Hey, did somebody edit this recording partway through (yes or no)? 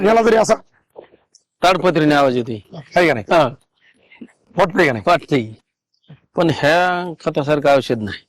yes